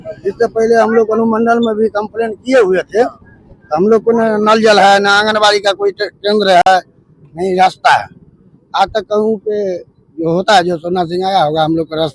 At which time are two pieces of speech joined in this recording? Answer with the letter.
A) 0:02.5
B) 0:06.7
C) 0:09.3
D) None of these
D